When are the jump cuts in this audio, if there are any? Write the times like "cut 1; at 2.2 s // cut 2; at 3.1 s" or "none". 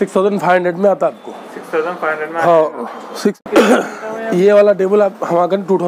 cut 1; at 3.4 s